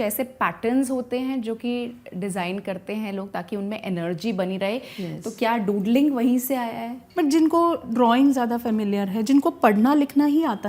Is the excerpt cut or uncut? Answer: cut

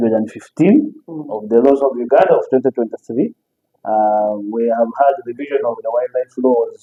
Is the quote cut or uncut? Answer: uncut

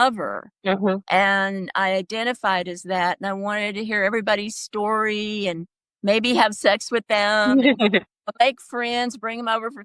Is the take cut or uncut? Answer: uncut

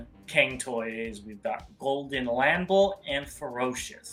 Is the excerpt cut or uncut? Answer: uncut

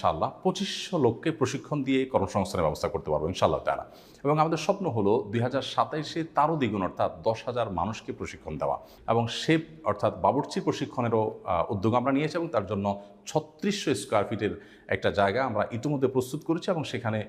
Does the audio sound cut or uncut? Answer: cut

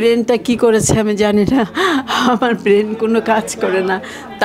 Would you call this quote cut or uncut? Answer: uncut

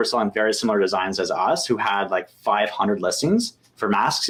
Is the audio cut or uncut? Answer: uncut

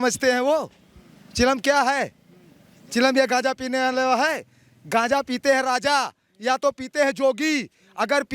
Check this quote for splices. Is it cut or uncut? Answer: uncut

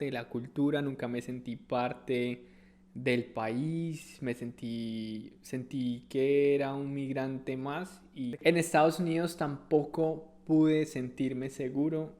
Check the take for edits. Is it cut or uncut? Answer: cut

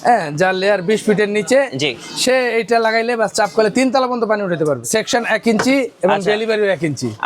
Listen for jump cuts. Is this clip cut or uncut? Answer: cut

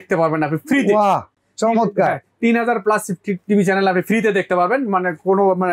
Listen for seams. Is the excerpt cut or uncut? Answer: uncut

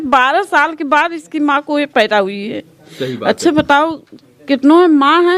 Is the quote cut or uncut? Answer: uncut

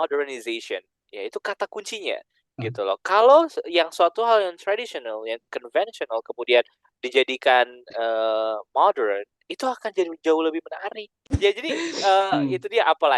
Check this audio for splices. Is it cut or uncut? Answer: cut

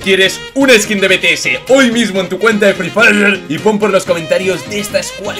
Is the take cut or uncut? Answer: uncut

